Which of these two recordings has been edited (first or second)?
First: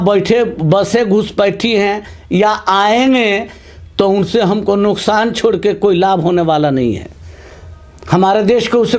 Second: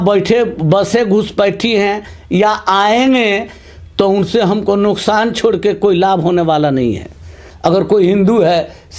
second